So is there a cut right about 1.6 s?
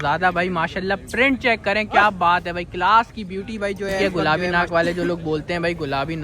no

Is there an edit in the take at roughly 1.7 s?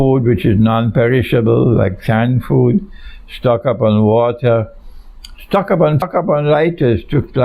no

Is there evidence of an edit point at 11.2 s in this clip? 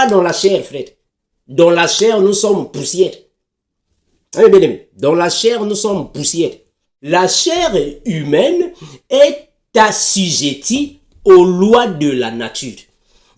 no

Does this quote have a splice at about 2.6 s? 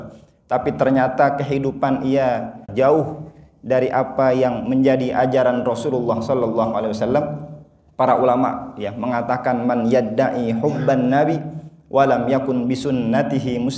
yes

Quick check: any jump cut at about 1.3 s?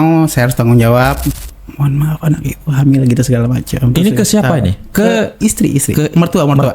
yes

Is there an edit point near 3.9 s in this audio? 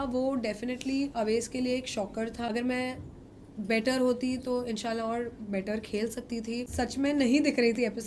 no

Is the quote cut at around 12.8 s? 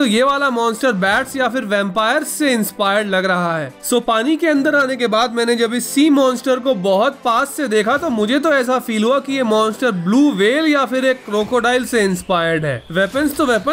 yes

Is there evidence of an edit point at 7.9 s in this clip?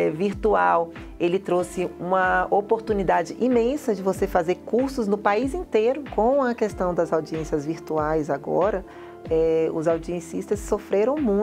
no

